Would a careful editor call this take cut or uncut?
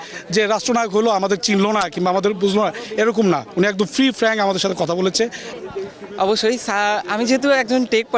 cut